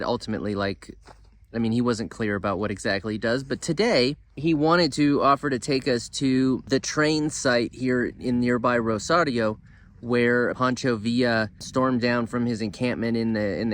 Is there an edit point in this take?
yes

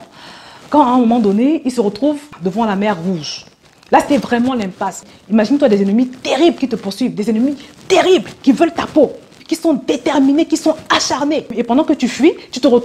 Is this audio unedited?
no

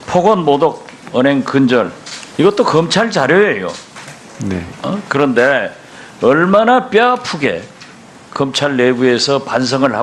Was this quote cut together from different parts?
yes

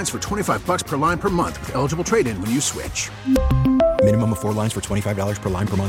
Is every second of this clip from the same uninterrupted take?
yes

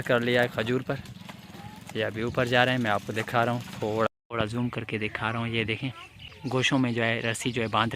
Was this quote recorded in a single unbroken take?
no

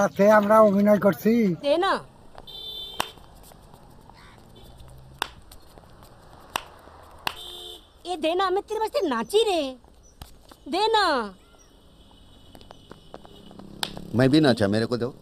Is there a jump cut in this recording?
yes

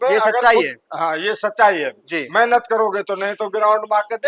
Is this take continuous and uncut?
yes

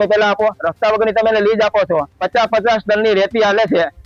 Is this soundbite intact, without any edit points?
no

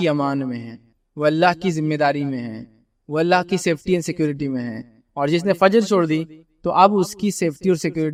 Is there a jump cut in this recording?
no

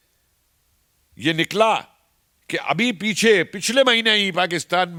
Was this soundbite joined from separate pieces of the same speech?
no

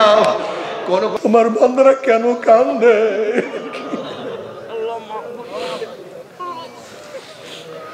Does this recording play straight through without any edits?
no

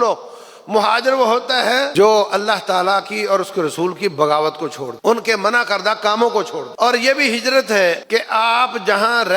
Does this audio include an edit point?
yes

